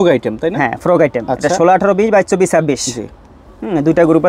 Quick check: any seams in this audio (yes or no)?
no